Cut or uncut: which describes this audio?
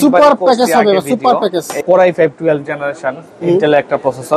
cut